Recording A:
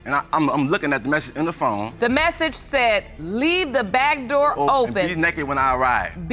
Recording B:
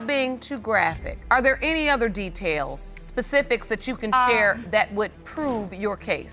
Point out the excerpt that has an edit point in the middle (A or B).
A